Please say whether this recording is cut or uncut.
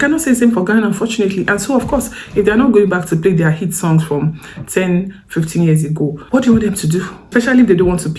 cut